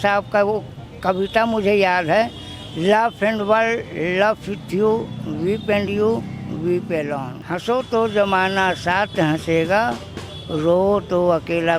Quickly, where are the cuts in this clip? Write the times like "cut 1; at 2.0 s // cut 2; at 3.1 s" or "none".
cut 1; at 7.4 s